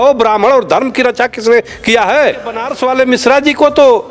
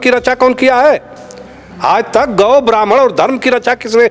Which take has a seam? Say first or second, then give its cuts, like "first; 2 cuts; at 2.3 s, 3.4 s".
first; 1 cut; at 2.7 s